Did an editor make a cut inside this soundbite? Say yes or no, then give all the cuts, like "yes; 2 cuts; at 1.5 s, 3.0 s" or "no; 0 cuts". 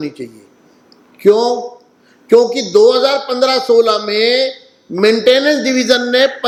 no; 0 cuts